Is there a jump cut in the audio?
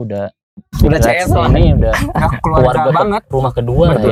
no; 0 cuts

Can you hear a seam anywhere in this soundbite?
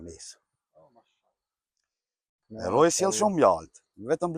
yes; 1 cut; at 2.4 s

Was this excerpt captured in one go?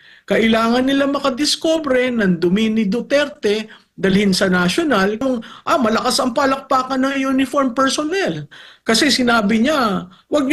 no; 1 cut; at 5.2 s

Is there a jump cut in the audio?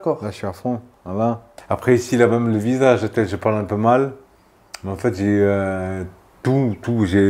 yes; 1 cut; at 1.5 s

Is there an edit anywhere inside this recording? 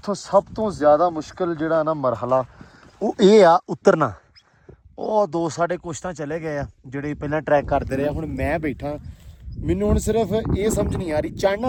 no; 0 cuts

